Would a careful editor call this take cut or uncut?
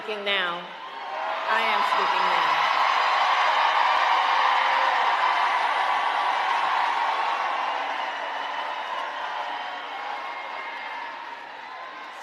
cut